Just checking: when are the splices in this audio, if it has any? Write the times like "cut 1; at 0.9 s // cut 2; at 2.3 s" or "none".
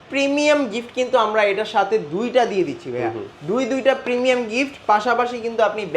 none